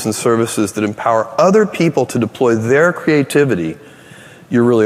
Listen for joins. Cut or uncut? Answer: uncut